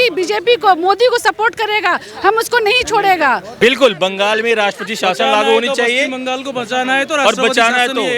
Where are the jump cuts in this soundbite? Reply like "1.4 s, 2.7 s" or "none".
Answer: 3.5 s

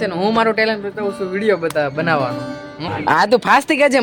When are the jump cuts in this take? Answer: 2.9 s

